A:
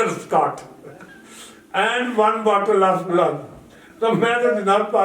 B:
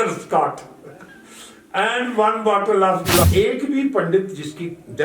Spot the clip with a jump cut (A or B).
B